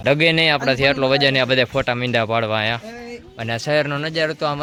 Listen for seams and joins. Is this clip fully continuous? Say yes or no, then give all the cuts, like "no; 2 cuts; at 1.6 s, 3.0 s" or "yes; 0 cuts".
yes; 0 cuts